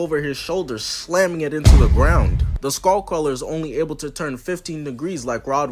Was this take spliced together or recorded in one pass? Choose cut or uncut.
uncut